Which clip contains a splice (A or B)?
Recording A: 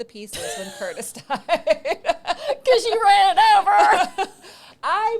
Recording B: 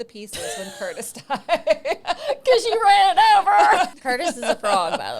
B